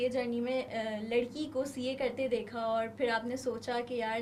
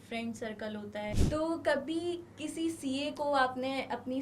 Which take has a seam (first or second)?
second